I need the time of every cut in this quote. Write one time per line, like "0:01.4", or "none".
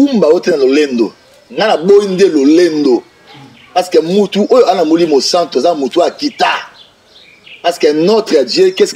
none